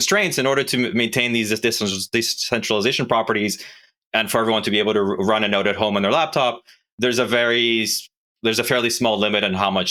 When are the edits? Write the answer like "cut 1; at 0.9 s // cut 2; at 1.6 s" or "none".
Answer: none